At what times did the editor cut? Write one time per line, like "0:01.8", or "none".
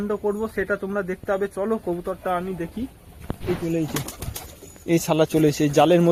none